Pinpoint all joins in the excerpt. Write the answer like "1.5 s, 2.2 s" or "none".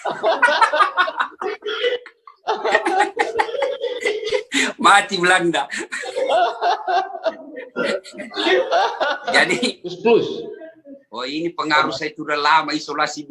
10.0 s